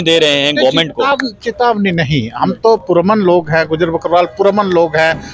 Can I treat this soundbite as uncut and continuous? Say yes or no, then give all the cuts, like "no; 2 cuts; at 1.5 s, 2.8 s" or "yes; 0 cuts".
yes; 0 cuts